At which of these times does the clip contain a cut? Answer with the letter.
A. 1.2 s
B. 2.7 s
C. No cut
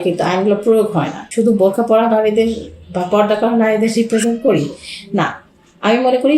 A